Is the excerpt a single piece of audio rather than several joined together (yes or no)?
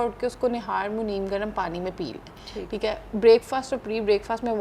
yes